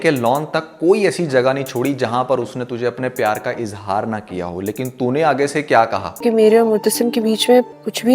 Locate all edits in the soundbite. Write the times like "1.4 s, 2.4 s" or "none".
none